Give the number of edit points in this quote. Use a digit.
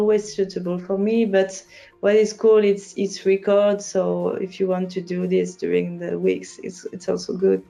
0